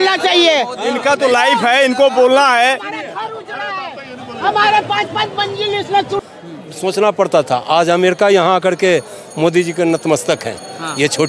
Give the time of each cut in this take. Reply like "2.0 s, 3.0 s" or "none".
6.2 s